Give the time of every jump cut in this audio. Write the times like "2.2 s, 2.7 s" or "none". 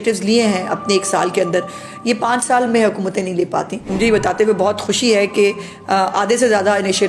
3.8 s